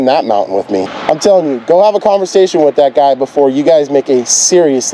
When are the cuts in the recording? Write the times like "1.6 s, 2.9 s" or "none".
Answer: 0.9 s